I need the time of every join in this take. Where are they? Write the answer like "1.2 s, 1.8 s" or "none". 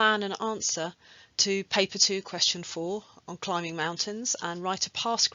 4.3 s